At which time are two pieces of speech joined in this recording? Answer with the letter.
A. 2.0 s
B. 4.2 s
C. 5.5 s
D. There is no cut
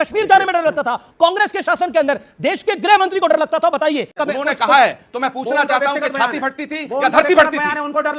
B